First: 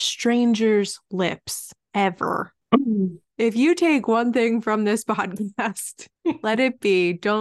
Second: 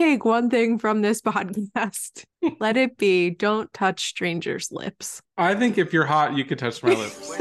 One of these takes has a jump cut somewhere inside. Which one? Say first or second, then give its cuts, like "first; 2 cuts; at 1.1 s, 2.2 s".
first; 1 cut; at 2.5 s